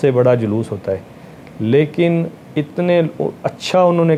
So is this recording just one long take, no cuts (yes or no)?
yes